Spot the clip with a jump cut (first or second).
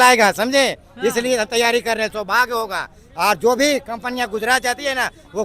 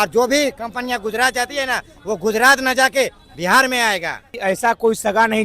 second